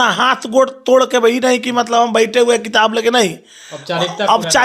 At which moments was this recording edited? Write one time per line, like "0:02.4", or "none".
none